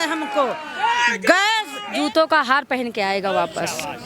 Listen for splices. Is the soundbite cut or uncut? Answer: cut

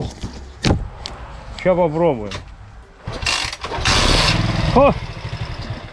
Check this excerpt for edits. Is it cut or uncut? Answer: uncut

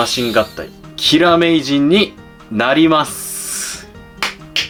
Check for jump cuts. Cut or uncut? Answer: uncut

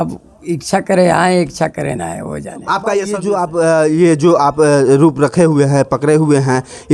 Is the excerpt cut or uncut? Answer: cut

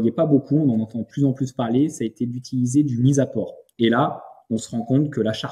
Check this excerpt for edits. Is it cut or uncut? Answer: cut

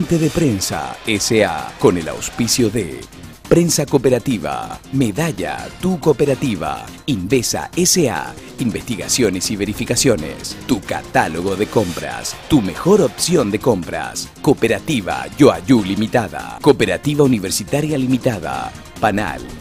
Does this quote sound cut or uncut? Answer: cut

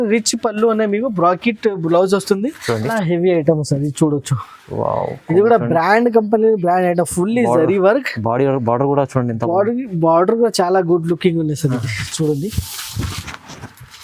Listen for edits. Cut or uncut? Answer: cut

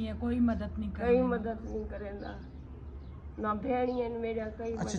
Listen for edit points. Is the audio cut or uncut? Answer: uncut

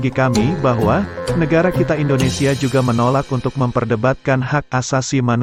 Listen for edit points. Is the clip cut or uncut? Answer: uncut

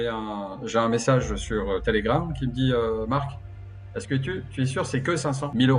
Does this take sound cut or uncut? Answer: uncut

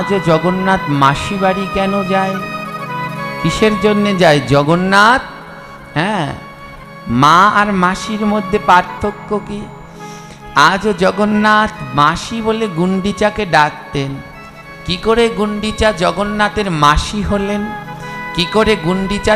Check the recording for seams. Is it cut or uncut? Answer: uncut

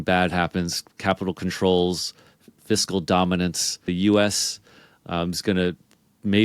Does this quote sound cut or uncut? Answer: cut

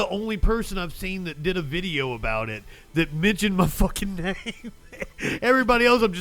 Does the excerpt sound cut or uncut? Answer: uncut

